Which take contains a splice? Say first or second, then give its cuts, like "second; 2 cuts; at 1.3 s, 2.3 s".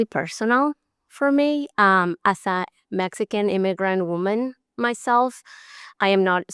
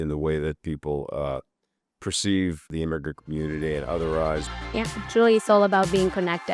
second; 2 cuts; at 2.7 s, 4.7 s